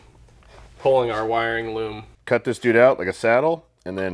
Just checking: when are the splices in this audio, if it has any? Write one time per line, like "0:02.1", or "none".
0:02.1

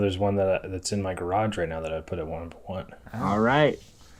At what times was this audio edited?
none

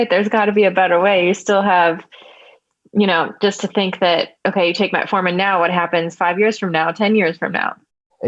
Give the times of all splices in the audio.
none

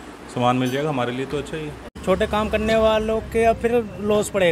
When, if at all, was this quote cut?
0:01.8

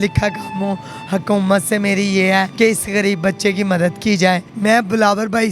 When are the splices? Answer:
0:02.5
0:04.5

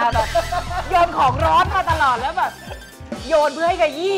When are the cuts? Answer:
none

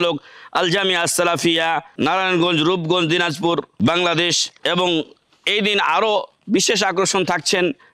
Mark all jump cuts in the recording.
0:01.9
0:03.7
0:04.5

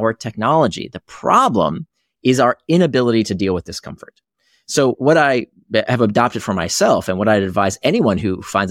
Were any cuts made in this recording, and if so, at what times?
0:05.0

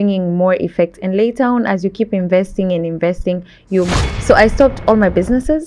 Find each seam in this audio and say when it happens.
0:03.9

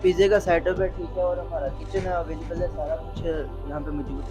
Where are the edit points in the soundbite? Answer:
none

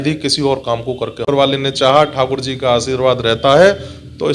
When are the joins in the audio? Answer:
0:01.3

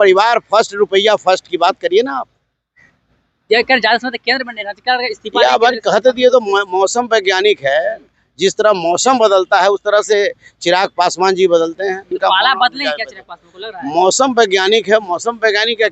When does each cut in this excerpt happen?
0:12.2

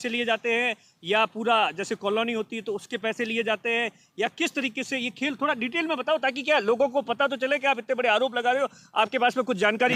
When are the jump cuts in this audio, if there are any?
none

